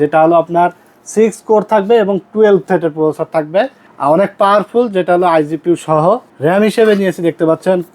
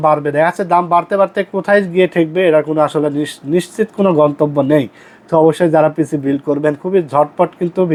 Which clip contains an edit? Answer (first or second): first